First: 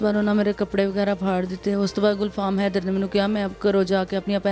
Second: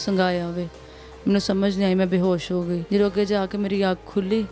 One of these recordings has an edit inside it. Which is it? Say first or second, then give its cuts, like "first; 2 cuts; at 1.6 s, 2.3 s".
second; 1 cut; at 2.8 s